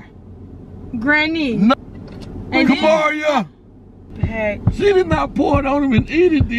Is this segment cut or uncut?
cut